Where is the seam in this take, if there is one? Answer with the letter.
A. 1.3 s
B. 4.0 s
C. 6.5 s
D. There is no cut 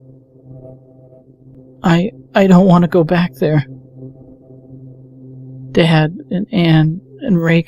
A